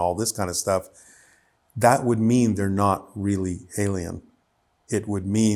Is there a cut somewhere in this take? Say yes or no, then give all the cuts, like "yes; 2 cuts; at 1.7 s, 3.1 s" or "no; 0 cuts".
no; 0 cuts